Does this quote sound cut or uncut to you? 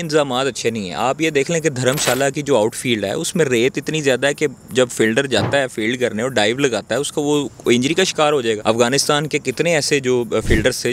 cut